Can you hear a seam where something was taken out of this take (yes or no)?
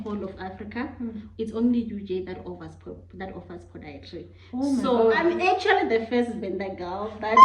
yes